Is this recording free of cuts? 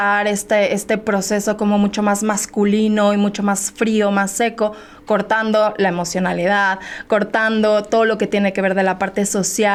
yes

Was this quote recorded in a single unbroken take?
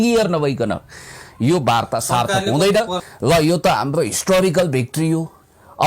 no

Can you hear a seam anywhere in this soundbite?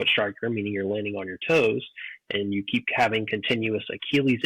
no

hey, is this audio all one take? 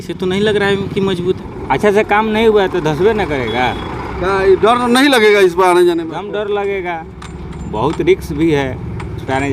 no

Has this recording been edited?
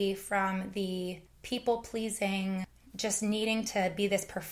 yes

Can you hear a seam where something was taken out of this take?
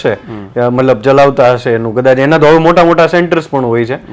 no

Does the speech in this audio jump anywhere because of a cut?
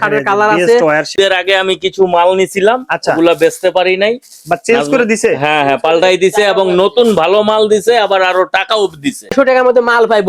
yes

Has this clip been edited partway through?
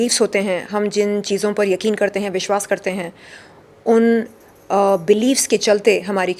no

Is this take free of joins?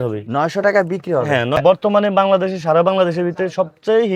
no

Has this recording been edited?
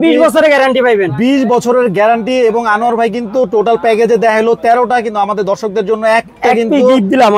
no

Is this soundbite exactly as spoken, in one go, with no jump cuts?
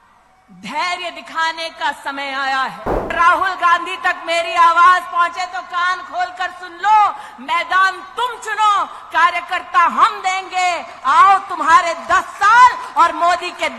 no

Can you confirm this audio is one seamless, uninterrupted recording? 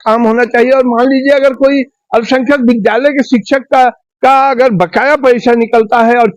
yes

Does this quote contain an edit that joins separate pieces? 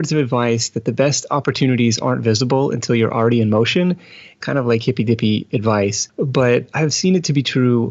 yes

